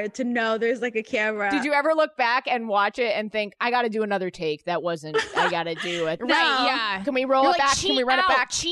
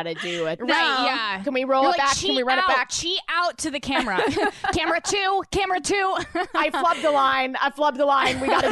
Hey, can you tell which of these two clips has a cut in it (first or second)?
first